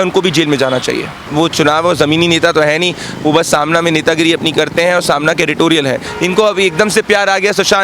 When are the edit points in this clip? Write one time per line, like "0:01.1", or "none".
0:01.3
0:06.1